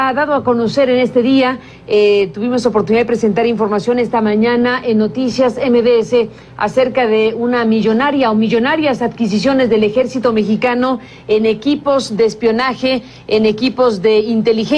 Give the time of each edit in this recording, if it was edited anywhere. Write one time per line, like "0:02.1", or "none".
0:10.0